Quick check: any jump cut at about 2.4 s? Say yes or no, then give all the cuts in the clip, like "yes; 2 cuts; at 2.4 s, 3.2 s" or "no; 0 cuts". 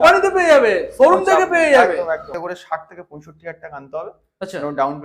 yes; 1 cut; at 2.4 s